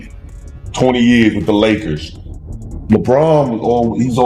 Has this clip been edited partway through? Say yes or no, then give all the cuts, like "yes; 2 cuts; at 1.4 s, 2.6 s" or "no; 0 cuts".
no; 0 cuts